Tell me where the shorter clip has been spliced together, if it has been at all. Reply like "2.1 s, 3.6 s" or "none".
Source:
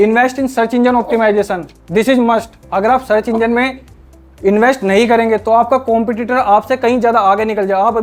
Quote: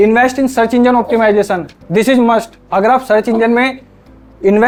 none